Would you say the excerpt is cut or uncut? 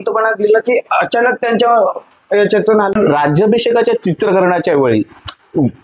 cut